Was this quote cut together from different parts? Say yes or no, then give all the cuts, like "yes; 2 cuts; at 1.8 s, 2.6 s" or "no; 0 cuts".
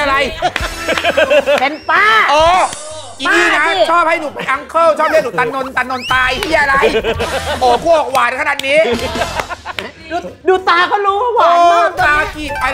no; 0 cuts